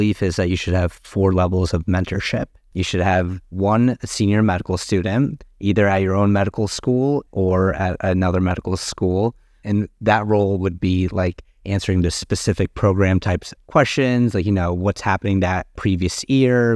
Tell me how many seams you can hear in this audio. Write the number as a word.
four